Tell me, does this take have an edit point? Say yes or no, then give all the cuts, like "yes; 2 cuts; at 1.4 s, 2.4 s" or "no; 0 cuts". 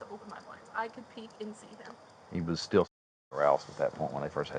no; 0 cuts